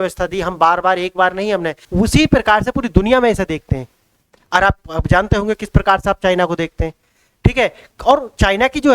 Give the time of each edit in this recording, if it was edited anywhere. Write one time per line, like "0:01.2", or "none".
0:01.8